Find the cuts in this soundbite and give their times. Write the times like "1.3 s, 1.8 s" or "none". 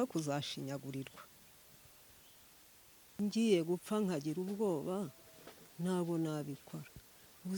3.2 s

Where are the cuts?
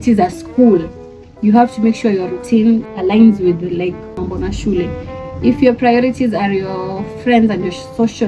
none

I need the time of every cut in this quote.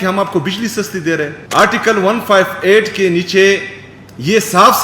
1.4 s

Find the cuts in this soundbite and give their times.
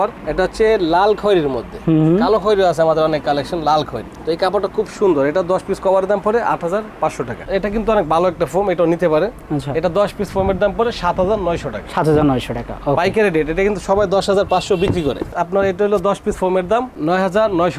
7.4 s, 15.3 s

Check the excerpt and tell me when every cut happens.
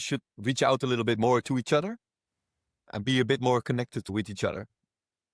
4.1 s

